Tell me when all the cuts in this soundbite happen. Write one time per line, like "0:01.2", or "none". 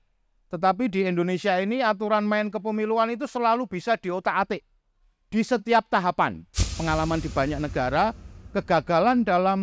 0:06.7